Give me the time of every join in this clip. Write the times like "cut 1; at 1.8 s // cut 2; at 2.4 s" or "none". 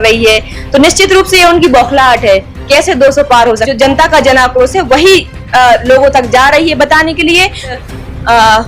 cut 1; at 3.7 s // cut 2; at 7.8 s